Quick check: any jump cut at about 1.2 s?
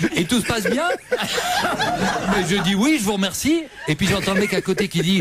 no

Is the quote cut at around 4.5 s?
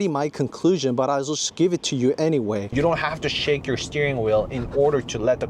no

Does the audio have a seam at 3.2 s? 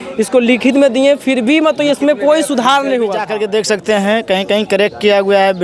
yes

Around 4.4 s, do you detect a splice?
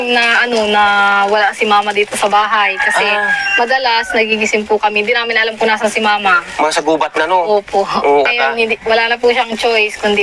no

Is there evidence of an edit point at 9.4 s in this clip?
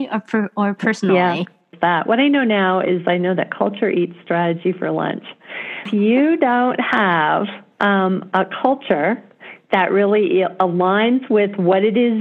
no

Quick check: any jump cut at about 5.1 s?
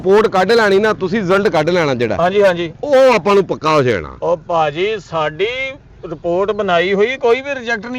no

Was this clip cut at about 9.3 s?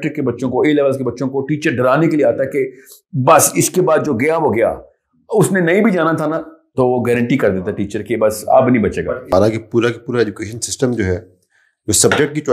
yes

